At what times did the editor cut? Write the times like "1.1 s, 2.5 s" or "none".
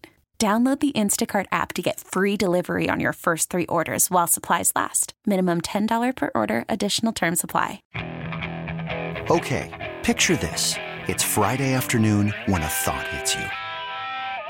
7.9 s